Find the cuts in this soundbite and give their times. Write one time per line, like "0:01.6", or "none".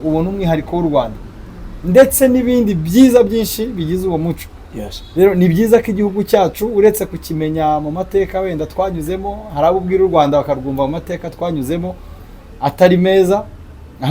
none